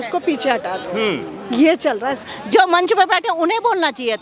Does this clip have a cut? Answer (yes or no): yes